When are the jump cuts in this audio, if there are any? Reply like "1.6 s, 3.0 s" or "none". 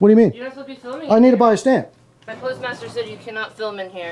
2.3 s